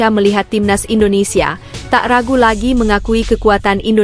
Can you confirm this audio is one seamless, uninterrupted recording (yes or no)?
yes